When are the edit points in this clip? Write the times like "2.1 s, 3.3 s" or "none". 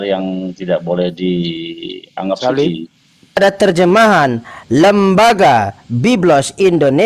3.4 s

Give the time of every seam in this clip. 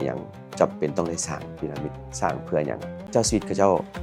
3.0 s

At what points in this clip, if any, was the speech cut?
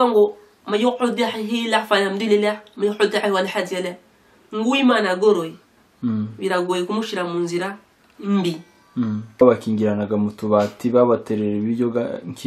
9.4 s

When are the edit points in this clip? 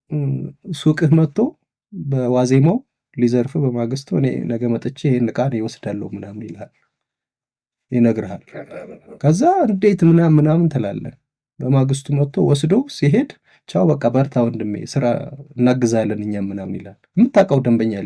none

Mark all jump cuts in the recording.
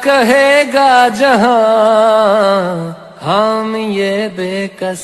none

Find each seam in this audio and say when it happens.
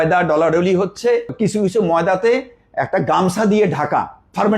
1.3 s

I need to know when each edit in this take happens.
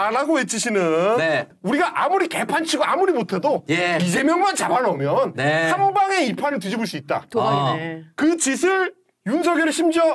1.5 s

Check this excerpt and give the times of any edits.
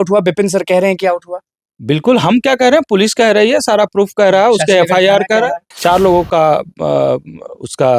5.7 s

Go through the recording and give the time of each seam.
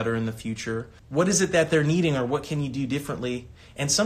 1.0 s

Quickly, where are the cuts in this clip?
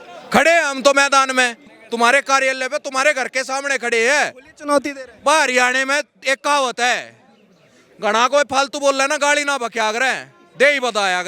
1.7 s

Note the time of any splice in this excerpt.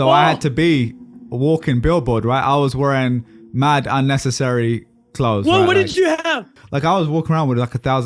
6.5 s

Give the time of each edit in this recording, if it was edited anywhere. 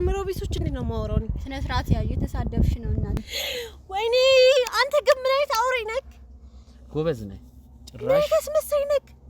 3.3 s

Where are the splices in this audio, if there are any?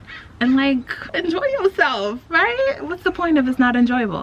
none

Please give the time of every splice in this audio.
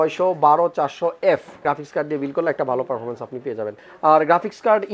1.6 s, 3.8 s

